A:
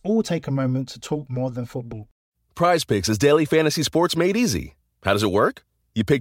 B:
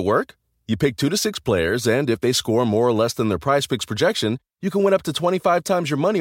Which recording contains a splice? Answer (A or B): A